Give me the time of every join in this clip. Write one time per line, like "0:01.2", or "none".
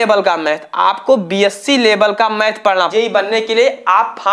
0:02.9